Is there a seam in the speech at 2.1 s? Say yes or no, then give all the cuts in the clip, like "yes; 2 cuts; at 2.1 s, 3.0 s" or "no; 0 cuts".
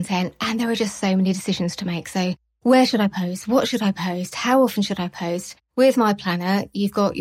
no; 0 cuts